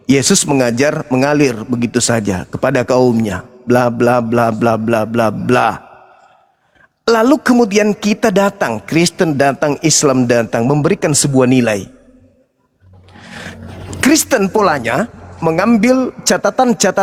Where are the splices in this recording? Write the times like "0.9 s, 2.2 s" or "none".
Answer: none